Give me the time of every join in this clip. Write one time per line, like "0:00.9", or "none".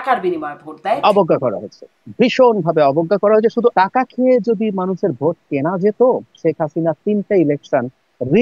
0:01.0
0:03.7